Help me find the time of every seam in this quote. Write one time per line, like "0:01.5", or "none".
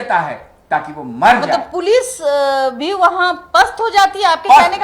none